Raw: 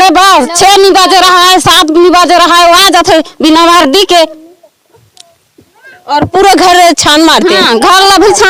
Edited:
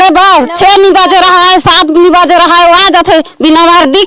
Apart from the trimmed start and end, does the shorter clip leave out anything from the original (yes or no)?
no